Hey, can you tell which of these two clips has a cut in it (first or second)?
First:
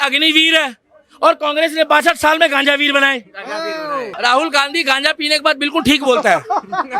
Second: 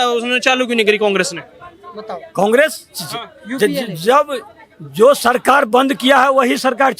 first